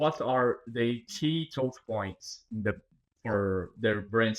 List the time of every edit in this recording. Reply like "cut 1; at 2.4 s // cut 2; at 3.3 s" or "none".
cut 1; at 3.0 s